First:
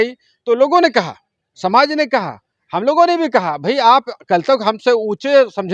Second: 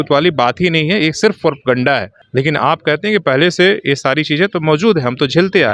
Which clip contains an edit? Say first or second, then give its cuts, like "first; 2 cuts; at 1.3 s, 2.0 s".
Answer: second; 1 cut; at 2.2 s